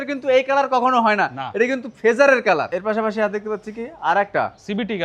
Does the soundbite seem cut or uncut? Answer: cut